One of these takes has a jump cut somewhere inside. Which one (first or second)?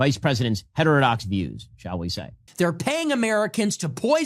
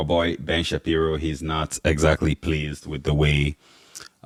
first